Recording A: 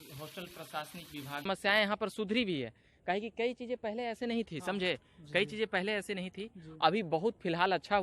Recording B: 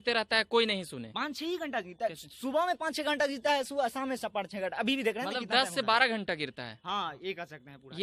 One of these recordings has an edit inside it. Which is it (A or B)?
A